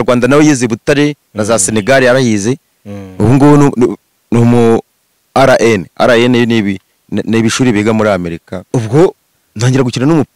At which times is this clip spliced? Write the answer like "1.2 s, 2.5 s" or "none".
8.7 s